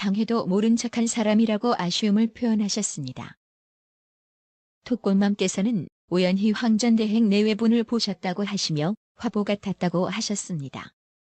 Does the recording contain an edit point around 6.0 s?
yes; 1 cut; at 6.0 s

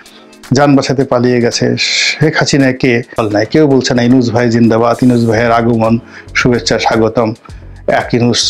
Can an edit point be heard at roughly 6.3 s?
no; 1 cut; at 3.2 s

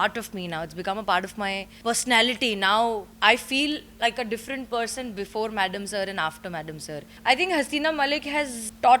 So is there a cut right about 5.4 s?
no; 2 cuts; at 1.7 s, 7.1 s

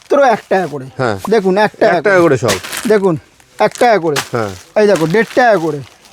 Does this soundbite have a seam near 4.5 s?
no; 1 cut; at 1.2 s

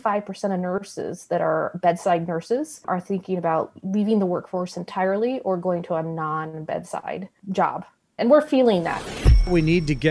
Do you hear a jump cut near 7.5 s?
no; 2 cuts; at 0.9 s, 9.1 s

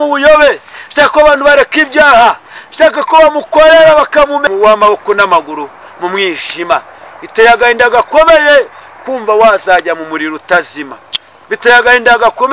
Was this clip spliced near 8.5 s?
no; 1 cut; at 4.4 s

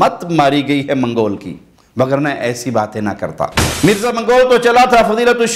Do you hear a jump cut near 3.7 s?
yes; 1 cut; at 3.7 s

